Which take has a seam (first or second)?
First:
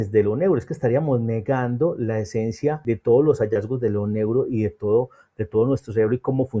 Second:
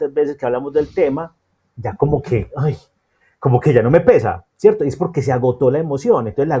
first